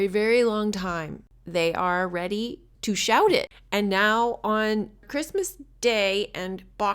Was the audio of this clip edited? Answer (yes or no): yes